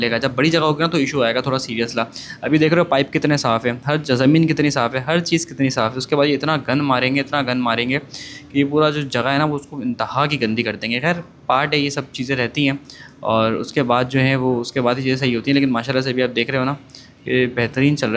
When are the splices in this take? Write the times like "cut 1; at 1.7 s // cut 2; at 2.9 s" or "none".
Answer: none